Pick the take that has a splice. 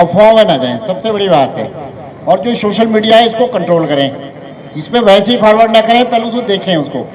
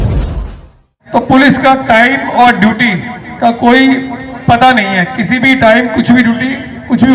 second; 1 cut; at 0.9 s

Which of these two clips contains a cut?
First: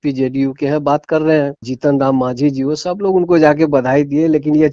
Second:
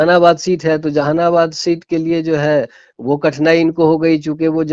first; 1 cut; at 1.6 s

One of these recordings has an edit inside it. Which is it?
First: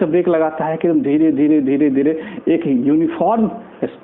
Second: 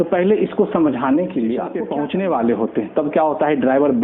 second; 1 cut; at 1.8 s

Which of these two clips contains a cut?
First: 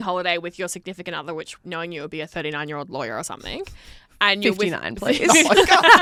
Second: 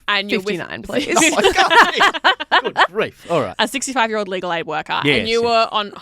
second; 1 cut; at 3.5 s

